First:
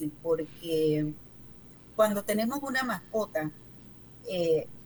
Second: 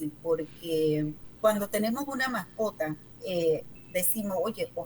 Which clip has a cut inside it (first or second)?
second